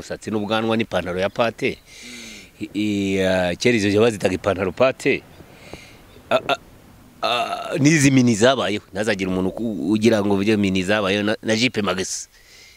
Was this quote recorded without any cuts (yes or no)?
yes